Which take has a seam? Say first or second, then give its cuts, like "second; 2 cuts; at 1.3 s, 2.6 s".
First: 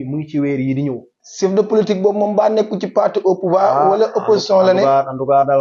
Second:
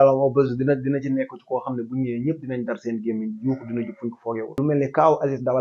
second; 1 cut; at 4.5 s